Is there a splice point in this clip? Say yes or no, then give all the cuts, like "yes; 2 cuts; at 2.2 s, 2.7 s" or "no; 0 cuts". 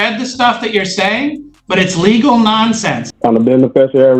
yes; 1 cut; at 3.1 s